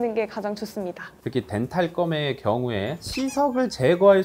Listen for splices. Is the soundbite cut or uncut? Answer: cut